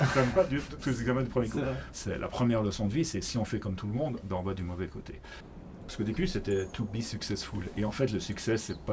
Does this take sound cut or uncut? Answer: cut